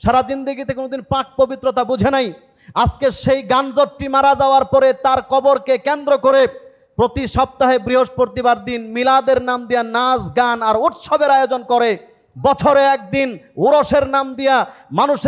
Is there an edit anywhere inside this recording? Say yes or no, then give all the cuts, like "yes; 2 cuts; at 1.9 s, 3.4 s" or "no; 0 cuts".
no; 0 cuts